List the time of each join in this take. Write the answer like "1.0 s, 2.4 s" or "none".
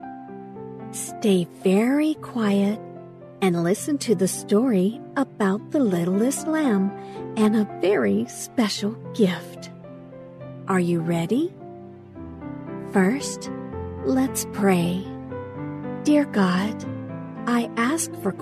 1.2 s